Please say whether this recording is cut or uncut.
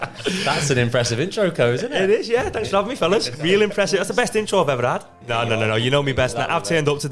cut